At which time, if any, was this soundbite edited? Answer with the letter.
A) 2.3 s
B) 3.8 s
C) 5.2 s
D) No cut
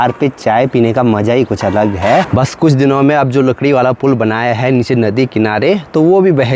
A